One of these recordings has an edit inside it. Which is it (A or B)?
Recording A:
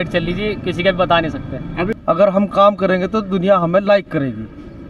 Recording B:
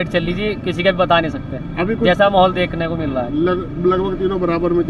A